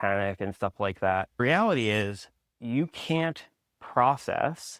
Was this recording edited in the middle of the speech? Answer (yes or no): yes